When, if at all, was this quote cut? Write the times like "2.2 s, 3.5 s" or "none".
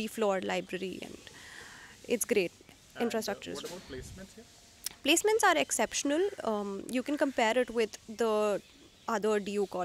none